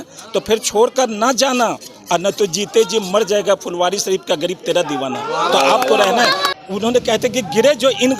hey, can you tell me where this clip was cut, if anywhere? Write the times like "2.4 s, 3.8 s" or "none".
6.5 s